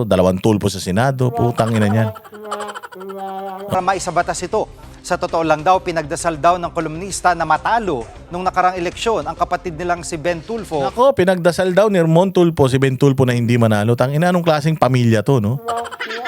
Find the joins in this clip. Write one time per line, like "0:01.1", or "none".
0:03.7